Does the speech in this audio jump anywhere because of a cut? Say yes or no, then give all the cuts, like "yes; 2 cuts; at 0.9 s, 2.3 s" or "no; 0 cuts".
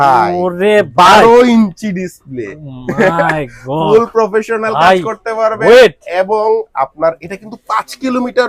no; 0 cuts